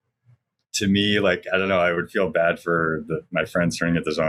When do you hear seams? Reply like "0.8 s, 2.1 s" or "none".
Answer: none